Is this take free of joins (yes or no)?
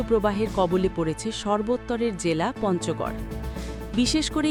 yes